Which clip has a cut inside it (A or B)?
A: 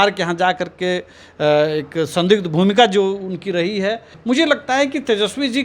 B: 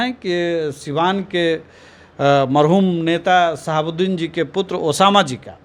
A